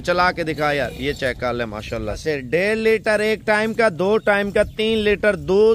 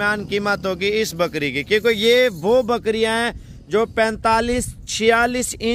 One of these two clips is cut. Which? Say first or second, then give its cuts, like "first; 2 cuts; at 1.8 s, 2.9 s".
first; 1 cut; at 2.2 s